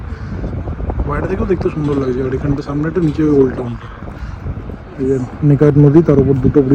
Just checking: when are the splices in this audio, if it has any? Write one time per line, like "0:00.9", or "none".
none